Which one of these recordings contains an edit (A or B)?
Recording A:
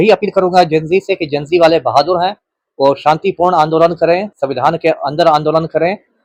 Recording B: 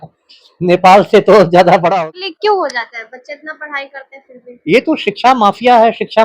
B